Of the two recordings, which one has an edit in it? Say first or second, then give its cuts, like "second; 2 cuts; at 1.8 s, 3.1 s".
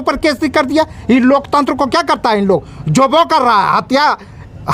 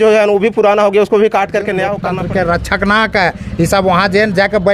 second; 1 cut; at 2.0 s